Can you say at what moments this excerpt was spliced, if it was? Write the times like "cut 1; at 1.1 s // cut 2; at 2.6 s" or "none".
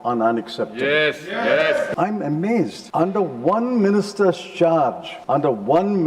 cut 1; at 1.9 s // cut 2; at 2.8 s // cut 3; at 5.1 s

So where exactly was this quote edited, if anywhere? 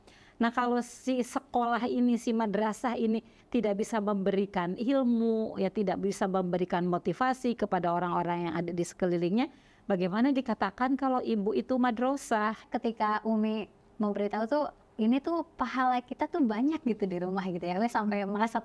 cut 1; at 12.6 s // cut 2; at 14.8 s

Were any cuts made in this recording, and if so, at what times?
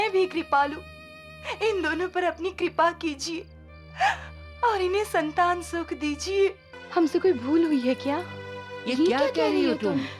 cut 1; at 6.7 s

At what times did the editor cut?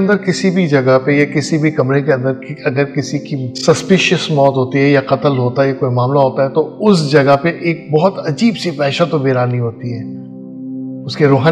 none

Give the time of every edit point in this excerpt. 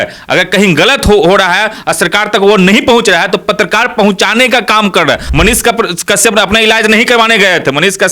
cut 1; at 5.3 s

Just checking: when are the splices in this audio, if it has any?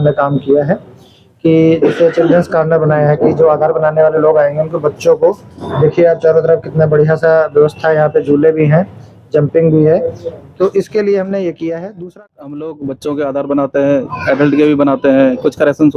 cut 1; at 12.0 s

